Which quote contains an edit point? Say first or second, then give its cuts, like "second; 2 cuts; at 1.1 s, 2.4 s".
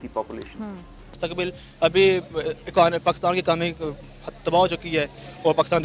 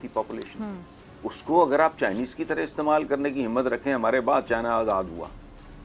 first; 1 cut; at 1.1 s